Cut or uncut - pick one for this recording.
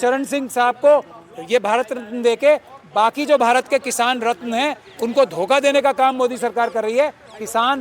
uncut